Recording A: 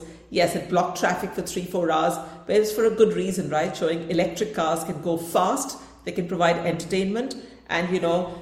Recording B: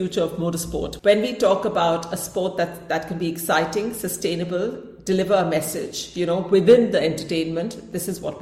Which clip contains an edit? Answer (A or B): B